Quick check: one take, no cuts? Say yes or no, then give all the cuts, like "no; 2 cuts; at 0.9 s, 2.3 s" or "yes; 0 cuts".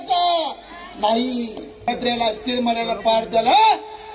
no; 1 cut; at 1.9 s